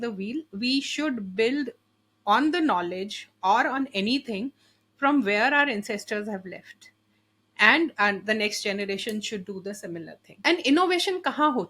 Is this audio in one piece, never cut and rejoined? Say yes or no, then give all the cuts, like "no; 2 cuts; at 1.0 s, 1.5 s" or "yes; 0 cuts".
no; 1 cut; at 10.3 s